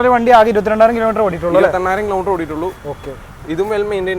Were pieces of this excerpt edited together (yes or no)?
no